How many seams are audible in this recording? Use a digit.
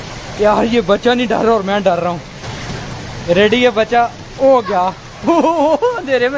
0